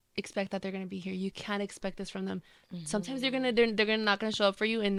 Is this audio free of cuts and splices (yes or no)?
yes